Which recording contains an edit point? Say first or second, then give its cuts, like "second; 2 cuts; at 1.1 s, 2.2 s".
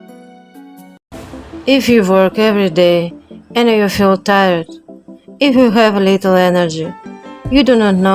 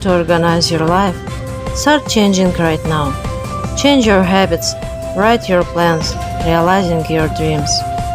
first; 1 cut; at 1.0 s